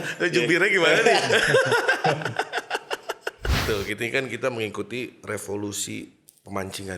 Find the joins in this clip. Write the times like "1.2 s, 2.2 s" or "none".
3.6 s

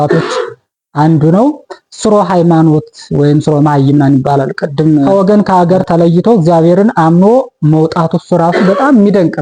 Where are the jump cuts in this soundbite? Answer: 5.1 s

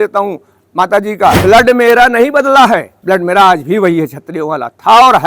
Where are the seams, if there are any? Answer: 1.4 s, 2.9 s

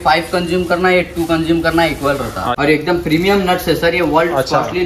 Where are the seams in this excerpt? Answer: 2.5 s

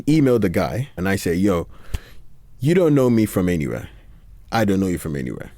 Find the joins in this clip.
0.9 s

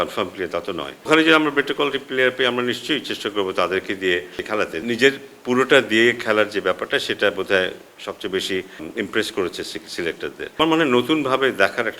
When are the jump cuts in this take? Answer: 1.1 s, 4.8 s, 8.9 s, 10.6 s

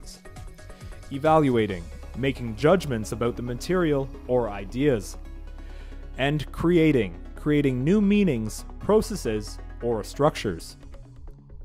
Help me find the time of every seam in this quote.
10.7 s

